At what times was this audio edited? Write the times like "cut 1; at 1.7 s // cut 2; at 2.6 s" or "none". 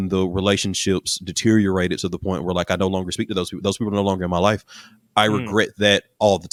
none